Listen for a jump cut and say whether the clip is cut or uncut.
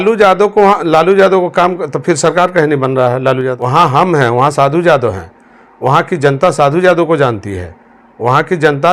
cut